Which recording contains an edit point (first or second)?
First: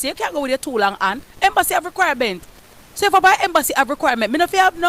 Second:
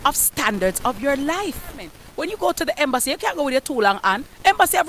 second